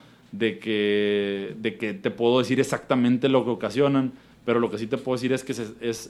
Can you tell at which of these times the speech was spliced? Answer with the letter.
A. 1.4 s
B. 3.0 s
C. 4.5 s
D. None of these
D